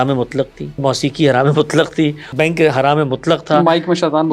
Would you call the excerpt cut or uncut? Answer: cut